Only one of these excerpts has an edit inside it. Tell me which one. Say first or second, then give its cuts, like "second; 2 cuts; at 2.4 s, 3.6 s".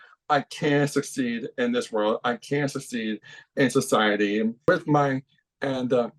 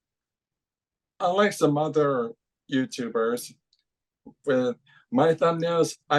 first; 1 cut; at 4.7 s